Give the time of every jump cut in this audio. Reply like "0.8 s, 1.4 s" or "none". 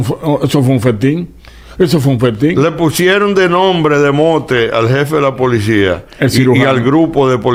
none